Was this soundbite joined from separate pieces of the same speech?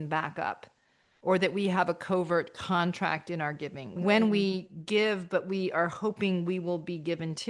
yes; 1 cut; at 4.0 s

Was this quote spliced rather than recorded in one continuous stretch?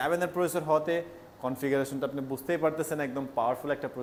no; 0 cuts

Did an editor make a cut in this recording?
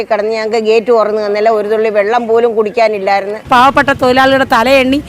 yes; 1 cut; at 3.5 s

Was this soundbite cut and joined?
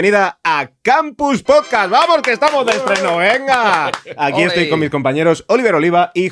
no; 0 cuts

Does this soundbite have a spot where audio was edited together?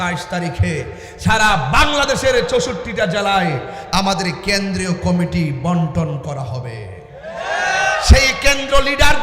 no; 0 cuts

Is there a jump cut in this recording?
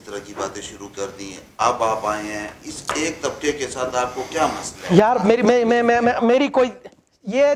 no; 0 cuts

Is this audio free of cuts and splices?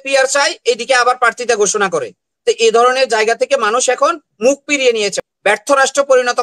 no; 1 cut; at 5.3 s

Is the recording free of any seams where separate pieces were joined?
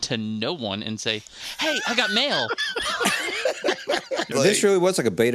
no; 1 cut; at 4.3 s

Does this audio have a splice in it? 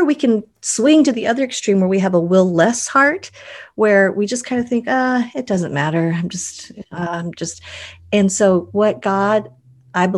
no; 0 cuts

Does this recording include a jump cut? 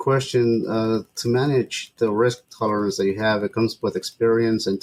no; 0 cuts

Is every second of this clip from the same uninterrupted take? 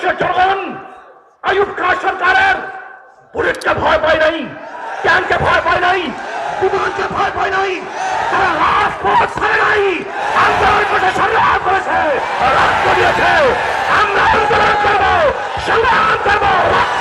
yes; 0 cuts

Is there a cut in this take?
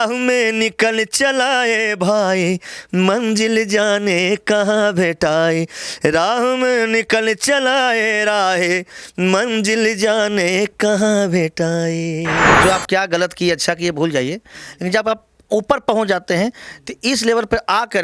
yes; 1 cut; at 12.5 s

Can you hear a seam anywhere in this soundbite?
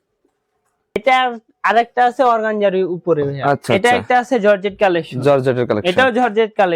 yes; 1 cut; at 1.0 s

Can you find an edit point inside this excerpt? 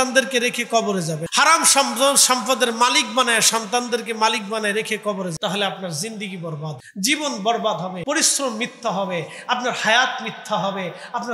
yes; 4 cuts; at 1.2 s, 5.3 s, 6.8 s, 8.0 s

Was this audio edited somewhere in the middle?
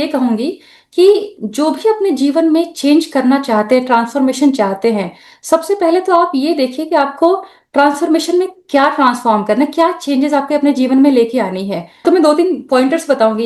no; 0 cuts

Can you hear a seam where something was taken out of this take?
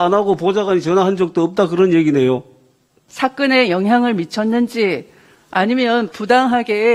yes; 1 cut; at 3.0 s

